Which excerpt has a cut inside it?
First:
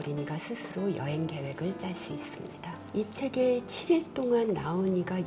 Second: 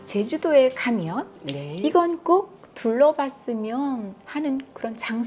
first; 1 cut; at 2.8 s

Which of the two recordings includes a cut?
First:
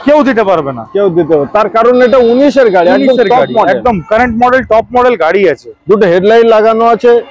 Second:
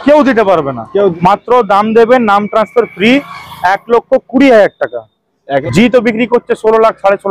second; 2 cuts; at 1.1 s, 5.6 s

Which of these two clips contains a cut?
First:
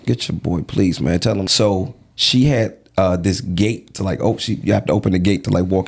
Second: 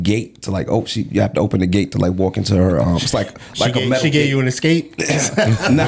first; 1 cut; at 1.5 s

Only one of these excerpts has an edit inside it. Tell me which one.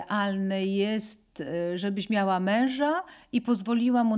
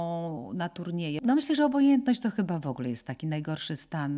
second; 1 cut; at 1.2 s

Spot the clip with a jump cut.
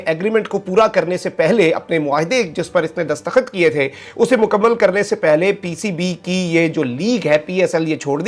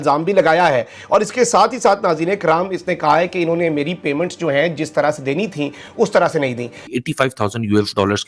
second; 1 cut; at 6.9 s

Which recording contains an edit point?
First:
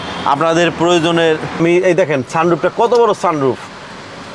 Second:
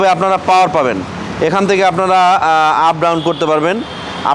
first; 1 cut; at 1.6 s

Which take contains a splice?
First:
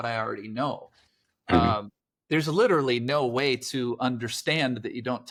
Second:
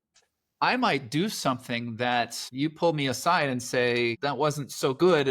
second; 2 cuts; at 2.4 s, 4.2 s

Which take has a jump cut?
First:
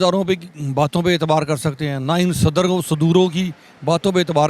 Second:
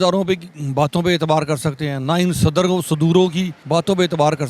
second; 1 cut; at 3.6 s

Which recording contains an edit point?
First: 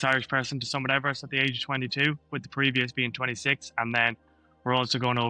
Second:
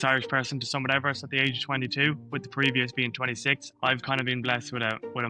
second; 1 cut; at 3.6 s

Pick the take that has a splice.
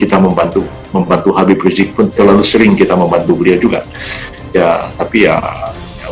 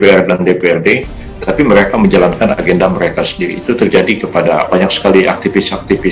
second; 1 cut; at 4.7 s

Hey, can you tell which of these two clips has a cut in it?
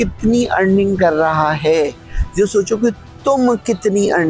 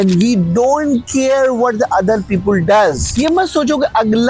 second; 1 cut; at 3.0 s

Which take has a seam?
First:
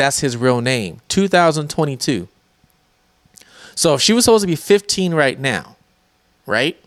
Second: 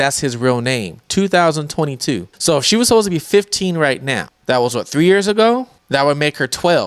second; 3 cuts; at 2.3 s, 4.3 s, 5.8 s

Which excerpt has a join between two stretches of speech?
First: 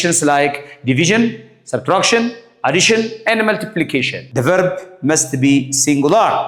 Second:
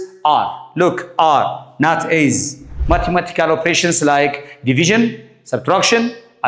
second; 1 cut; at 2.7 s

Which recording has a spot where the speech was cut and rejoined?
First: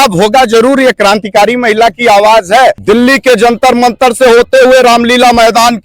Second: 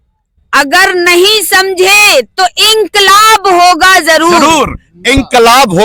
first; 1 cut; at 2.8 s

